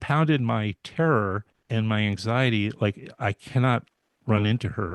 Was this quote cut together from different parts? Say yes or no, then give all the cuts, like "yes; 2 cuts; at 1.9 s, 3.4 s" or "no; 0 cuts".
yes; 1 cut; at 1.5 s